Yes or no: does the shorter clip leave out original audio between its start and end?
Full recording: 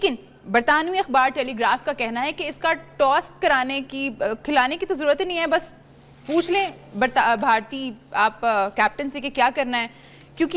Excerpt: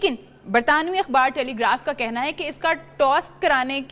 no